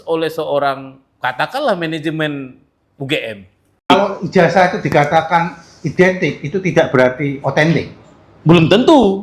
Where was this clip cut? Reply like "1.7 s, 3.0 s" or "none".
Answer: 3.9 s